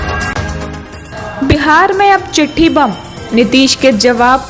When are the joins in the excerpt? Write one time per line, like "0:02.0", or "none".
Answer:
none